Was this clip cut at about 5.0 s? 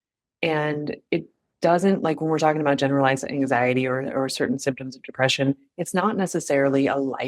no; 0 cuts

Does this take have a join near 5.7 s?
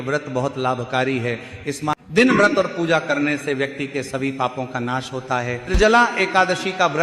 yes; 1 cut; at 5.7 s

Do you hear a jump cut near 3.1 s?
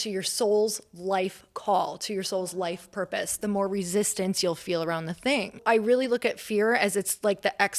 no; 1 cut; at 5.6 s

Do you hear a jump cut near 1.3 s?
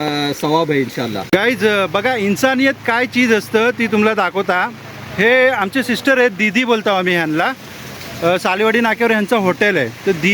yes; 1 cut; at 1.3 s

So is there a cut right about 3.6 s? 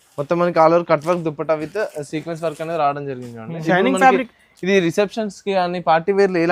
yes; 1 cut; at 3.6 s

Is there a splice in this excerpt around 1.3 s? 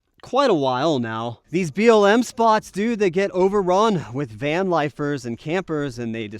yes; 1 cut; at 1.3 s

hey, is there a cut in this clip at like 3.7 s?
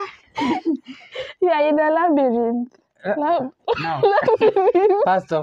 no; 0 cuts

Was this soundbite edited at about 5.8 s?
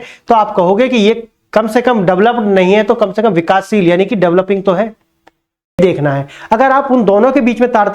yes; 1 cut; at 5.8 s

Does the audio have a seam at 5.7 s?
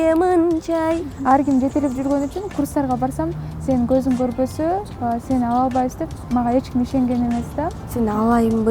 no; 2 cuts; at 1.1 s, 7.8 s

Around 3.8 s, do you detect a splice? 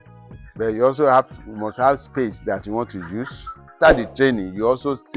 yes; 1 cut; at 3.8 s

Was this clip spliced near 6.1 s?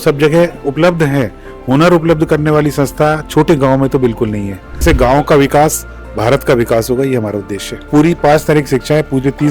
no; 2 cuts; at 4.8 s, 7.9 s

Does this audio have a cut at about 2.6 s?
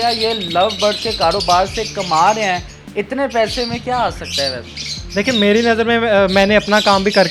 no; 0 cuts

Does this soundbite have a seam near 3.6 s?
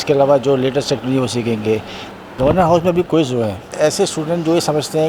no; 1 cut; at 2.1 s

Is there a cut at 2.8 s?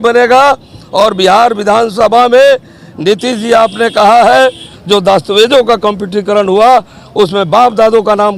no; 1 cut; at 4.7 s

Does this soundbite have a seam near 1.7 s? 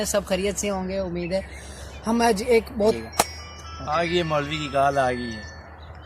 no; 1 cut; at 3.0 s

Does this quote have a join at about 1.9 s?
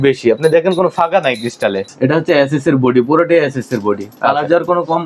yes; 1 cut; at 1.9 s

